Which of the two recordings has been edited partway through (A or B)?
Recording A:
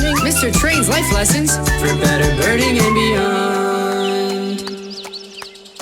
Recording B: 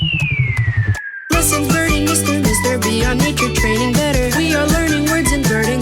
B